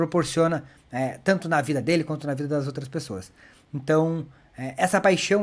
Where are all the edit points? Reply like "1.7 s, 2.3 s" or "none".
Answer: none